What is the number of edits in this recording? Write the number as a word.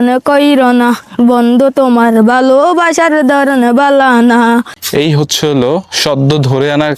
one